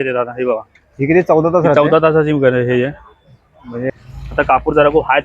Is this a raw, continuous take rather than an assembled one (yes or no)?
no